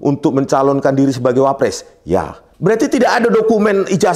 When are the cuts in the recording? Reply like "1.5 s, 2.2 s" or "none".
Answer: 2.4 s